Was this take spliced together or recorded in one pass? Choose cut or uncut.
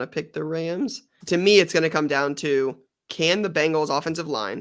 cut